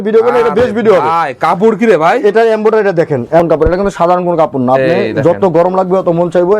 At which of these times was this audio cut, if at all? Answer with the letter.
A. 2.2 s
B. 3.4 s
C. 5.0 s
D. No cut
B